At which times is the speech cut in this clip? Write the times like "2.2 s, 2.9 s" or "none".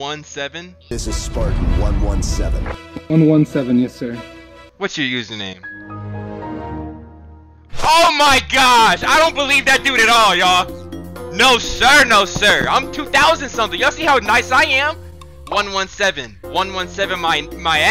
16.3 s